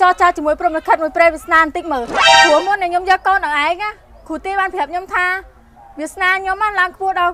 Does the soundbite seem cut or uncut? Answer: uncut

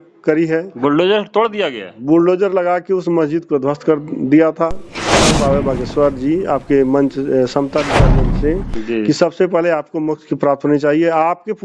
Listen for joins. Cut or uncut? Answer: cut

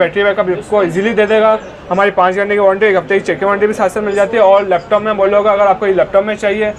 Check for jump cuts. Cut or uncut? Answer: uncut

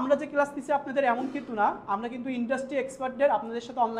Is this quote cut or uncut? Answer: uncut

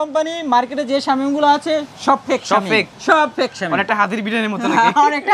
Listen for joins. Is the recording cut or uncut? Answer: uncut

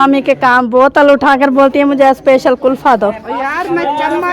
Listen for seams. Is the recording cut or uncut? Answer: uncut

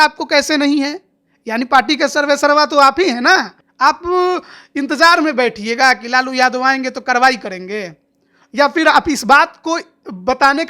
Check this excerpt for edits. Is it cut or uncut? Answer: cut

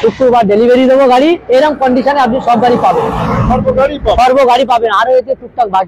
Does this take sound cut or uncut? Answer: uncut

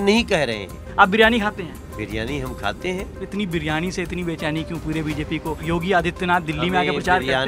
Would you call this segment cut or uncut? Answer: cut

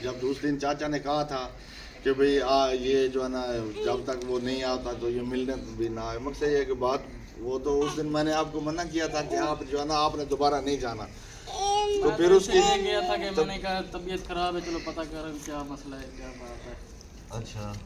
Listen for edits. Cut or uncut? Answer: uncut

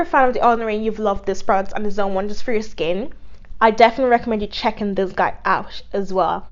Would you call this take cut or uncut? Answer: uncut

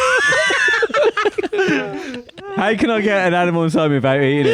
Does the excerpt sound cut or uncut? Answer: uncut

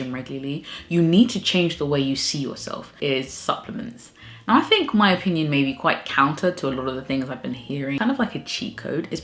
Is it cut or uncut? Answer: cut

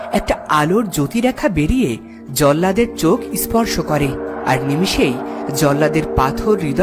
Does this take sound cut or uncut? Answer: uncut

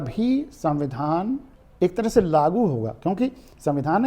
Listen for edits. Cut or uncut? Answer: cut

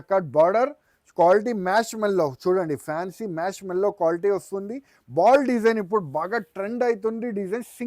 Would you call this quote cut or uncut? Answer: uncut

